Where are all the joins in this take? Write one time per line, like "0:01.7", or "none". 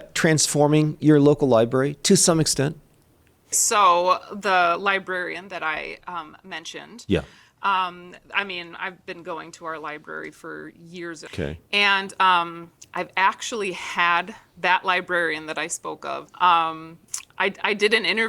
0:03.6
0:11.2
0:16.2